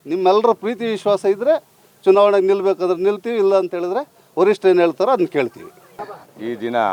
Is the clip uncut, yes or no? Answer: yes